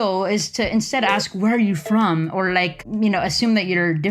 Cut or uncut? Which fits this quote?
cut